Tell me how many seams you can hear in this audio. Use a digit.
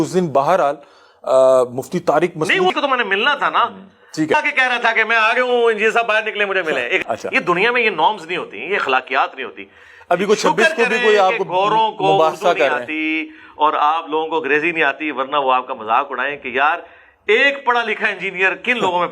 3